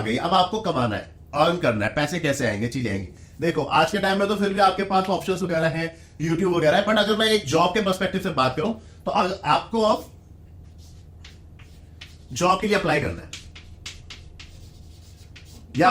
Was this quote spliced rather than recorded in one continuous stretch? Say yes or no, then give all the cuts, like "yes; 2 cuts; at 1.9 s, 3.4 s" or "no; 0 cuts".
no; 0 cuts